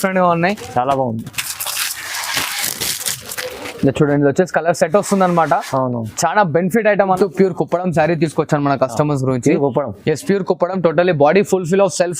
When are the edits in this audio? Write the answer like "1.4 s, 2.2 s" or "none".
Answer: 7.2 s